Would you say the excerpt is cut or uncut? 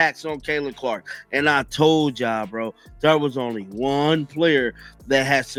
uncut